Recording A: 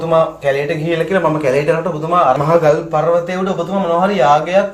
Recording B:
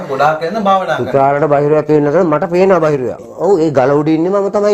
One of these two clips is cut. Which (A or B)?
B